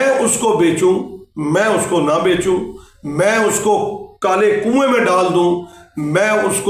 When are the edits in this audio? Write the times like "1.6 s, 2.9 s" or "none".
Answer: none